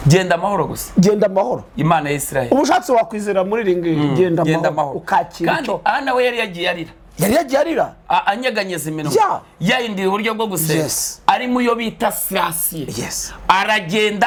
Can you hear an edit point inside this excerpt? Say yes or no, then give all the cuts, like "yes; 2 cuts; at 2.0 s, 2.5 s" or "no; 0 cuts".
no; 0 cuts